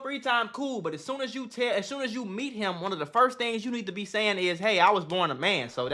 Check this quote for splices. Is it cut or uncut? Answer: uncut